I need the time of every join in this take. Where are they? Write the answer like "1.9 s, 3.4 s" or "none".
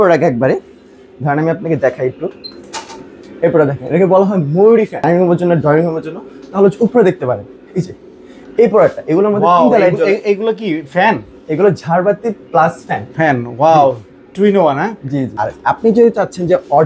5.0 s, 15.4 s